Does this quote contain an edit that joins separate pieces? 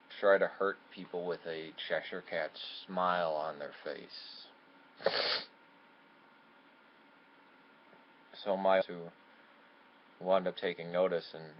no; 0 cuts

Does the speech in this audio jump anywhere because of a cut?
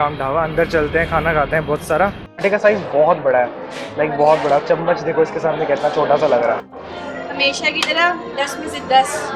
yes; 2 cuts; at 2.3 s, 6.7 s

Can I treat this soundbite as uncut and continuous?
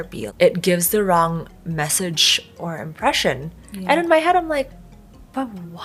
yes; 0 cuts

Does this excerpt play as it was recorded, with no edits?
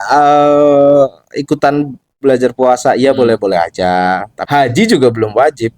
no; 1 cut; at 4.3 s

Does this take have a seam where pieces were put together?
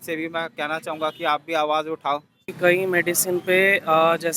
yes; 1 cut; at 2.5 s

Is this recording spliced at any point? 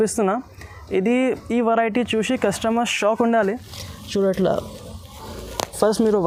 no; 0 cuts

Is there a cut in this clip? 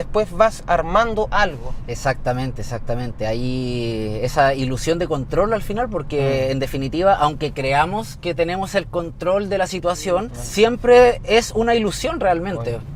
no; 0 cuts

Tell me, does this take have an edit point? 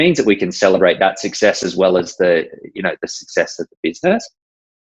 no; 0 cuts

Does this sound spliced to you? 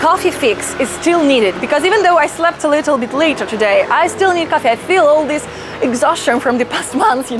no; 0 cuts

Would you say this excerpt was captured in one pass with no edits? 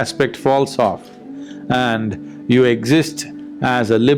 yes; 0 cuts

